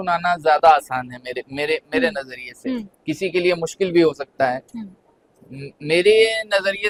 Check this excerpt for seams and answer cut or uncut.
uncut